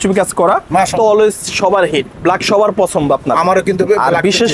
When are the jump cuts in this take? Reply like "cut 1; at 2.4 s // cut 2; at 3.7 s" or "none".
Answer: cut 1; at 0.9 s